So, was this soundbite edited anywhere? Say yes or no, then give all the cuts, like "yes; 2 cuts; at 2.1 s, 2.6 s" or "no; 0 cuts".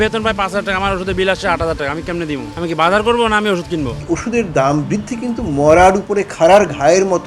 yes; 1 cut; at 4.0 s